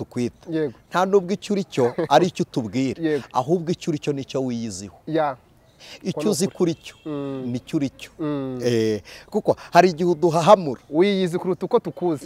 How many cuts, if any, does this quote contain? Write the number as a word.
zero